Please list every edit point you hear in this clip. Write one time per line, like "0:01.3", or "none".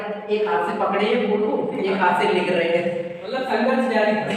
none